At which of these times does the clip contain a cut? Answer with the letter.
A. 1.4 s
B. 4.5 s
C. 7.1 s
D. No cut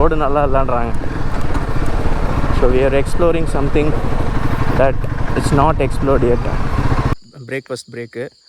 C